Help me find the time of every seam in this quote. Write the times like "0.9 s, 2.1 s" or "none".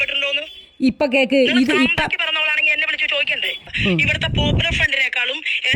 3.5 s